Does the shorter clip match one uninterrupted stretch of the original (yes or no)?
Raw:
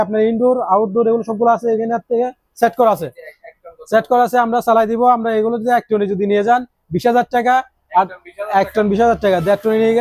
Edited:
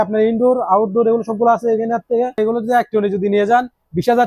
no